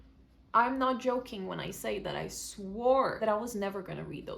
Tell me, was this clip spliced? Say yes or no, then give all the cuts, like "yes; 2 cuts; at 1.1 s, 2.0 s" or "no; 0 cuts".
yes; 1 cut; at 3.1 s